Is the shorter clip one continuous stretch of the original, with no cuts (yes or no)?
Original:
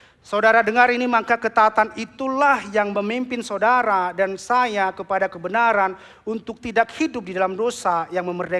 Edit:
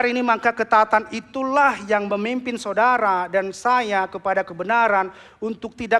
yes